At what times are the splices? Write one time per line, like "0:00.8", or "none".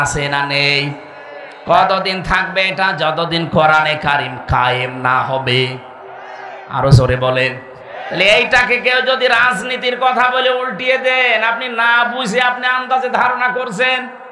none